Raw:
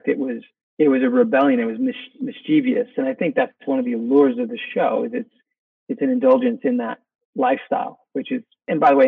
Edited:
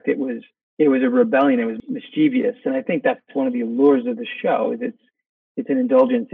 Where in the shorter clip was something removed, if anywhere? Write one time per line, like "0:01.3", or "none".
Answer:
0:01.7